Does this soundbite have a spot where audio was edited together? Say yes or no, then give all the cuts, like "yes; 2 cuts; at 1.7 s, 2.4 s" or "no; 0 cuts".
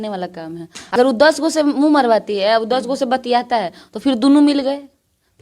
yes; 1 cut; at 1.0 s